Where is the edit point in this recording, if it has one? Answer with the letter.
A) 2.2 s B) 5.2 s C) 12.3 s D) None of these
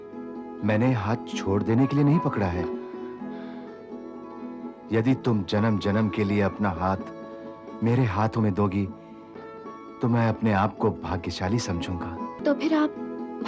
C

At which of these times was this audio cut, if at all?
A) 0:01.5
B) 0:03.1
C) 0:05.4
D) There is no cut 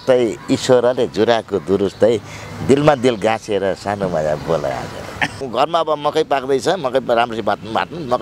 C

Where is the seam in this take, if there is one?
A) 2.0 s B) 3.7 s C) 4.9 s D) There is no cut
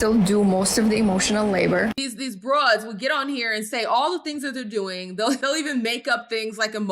A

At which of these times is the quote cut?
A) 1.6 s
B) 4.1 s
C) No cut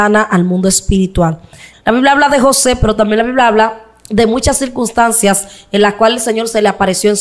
A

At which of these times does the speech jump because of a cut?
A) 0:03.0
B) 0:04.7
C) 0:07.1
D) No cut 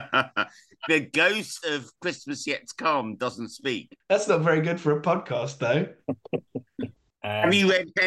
C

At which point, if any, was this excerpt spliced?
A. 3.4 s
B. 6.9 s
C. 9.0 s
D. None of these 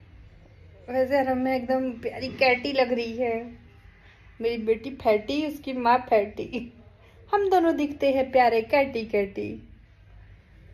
D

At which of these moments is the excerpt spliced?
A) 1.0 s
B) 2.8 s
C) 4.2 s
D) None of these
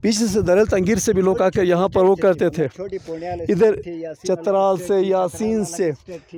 D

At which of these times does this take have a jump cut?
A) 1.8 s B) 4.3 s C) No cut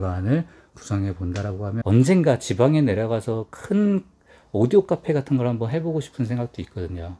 A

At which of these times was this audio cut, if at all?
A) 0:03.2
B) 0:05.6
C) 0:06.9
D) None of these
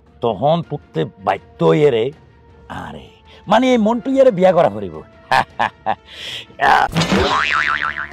C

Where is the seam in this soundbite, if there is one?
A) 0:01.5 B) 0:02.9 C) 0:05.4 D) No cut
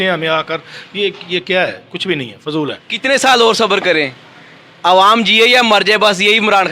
B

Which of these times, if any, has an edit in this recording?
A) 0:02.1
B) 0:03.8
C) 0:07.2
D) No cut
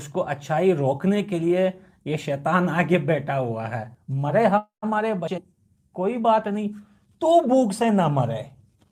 D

